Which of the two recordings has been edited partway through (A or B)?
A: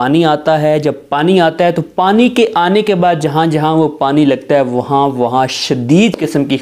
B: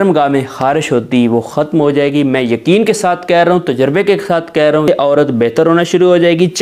B